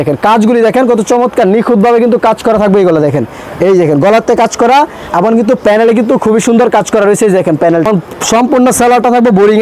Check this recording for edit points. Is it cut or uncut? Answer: uncut